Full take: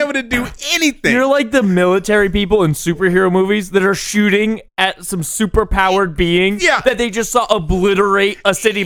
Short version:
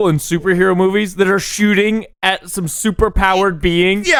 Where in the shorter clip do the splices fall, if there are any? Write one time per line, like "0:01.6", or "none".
none